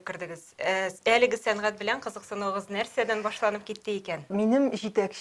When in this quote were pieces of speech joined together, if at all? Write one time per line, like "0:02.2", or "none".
0:04.2